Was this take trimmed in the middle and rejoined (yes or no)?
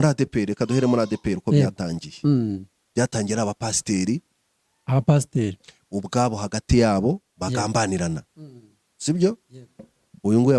no